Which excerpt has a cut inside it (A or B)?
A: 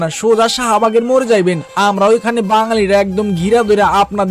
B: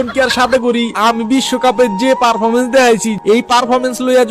B